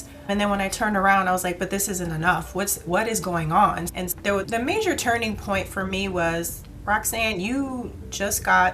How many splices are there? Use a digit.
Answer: 1